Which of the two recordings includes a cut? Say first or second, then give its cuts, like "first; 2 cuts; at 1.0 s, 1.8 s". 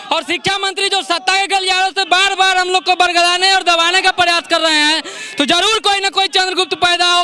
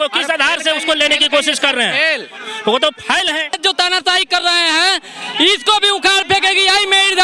second; 1 cut; at 3.6 s